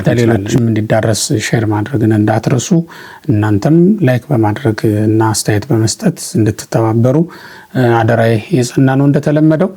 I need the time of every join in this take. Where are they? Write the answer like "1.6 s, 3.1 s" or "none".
none